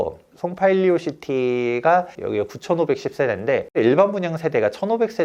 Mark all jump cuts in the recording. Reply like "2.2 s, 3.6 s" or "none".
2.1 s